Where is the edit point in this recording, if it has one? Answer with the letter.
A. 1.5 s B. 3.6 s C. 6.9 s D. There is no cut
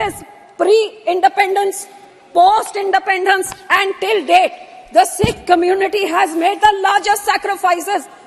D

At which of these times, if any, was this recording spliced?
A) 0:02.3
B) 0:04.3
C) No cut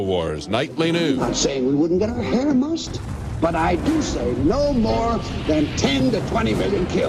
A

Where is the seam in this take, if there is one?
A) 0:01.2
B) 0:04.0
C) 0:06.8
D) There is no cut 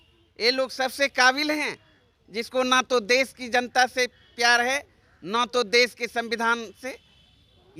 D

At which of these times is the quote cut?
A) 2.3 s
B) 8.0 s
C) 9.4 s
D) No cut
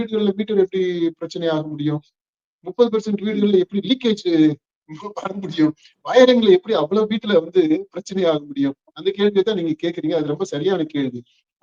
D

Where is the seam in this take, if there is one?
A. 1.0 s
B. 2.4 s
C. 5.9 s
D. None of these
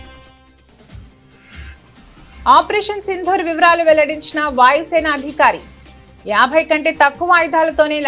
B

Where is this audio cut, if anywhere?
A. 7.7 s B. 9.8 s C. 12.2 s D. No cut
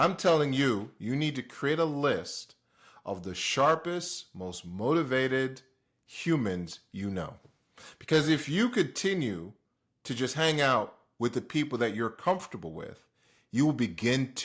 D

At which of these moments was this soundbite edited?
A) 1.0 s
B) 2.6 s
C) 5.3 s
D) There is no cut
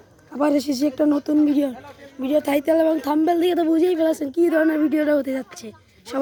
D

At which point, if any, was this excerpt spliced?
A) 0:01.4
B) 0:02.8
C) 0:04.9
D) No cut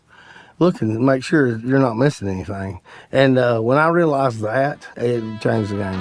C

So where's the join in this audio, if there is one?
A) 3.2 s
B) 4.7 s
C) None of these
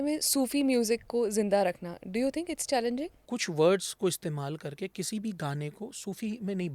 A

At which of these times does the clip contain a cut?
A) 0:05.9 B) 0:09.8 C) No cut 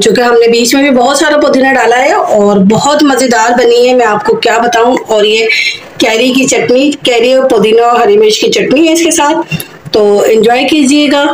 C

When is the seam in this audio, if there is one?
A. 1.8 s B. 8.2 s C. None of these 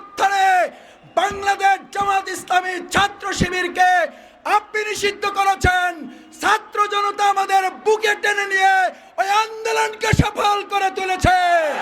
C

